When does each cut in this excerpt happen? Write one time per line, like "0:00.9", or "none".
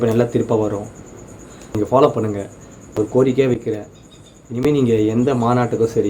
0:01.8
0:03.0